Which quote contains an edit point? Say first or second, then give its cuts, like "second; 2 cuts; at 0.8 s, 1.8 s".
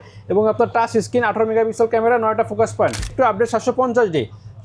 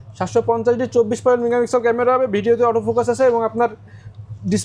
first; 1 cut; at 3.1 s